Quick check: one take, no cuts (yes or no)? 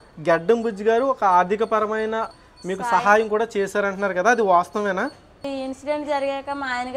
no